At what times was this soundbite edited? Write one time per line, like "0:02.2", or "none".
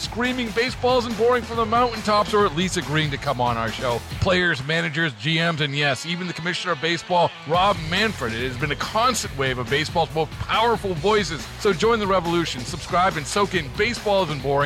none